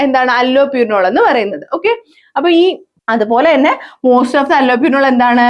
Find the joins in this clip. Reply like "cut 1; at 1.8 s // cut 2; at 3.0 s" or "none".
cut 1; at 2.9 s

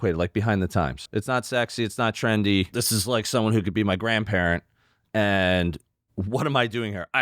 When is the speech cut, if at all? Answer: cut 1; at 1.0 s // cut 2; at 2.7 s

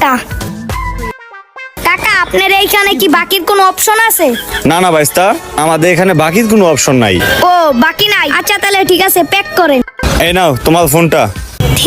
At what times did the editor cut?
cut 1; at 1.7 s // cut 2; at 9.8 s

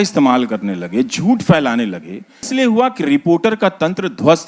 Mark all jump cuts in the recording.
cut 1; at 2.5 s

